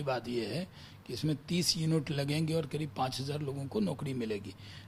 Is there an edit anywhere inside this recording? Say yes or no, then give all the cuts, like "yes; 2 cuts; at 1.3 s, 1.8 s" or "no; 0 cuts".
no; 0 cuts